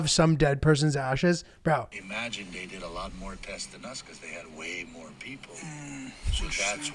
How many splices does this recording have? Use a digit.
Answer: 1